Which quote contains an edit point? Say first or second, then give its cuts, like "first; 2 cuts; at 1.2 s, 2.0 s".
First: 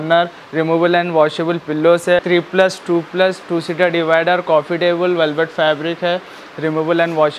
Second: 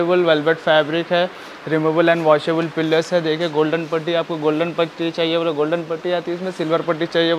first; 1 cut; at 2.2 s